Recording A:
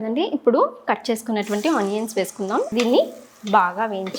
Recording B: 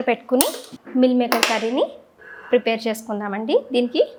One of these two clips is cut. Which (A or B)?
A